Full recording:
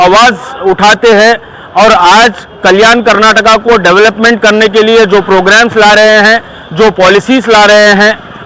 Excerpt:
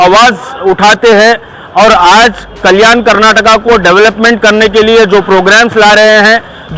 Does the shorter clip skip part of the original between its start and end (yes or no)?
no